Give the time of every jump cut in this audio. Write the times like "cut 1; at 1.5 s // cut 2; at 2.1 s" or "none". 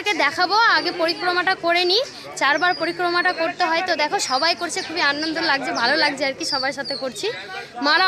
none